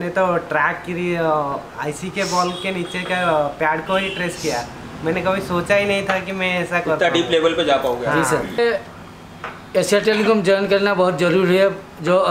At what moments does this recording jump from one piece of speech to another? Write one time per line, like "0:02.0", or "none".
0:08.6